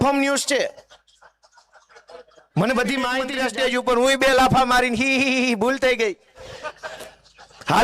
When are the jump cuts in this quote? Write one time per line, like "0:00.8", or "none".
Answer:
0:03.3